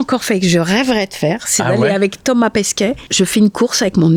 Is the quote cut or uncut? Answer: cut